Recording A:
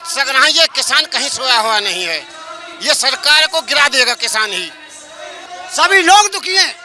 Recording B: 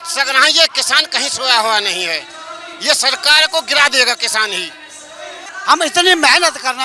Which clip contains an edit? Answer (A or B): B